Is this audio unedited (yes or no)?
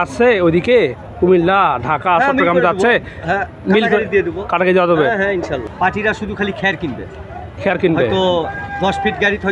no